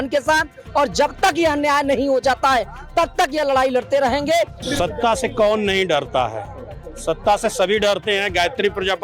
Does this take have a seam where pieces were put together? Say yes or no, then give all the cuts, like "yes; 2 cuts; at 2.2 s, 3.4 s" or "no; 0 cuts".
yes; 1 cut; at 4.6 s